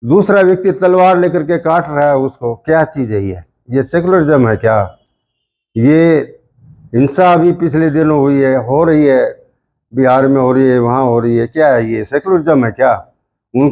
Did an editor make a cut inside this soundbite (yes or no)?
no